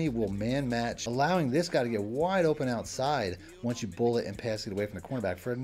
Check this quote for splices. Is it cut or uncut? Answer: cut